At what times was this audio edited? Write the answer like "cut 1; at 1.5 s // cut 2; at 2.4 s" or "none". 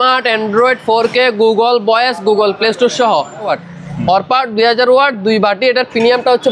cut 1; at 3.5 s